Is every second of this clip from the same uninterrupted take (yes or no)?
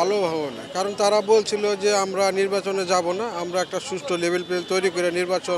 yes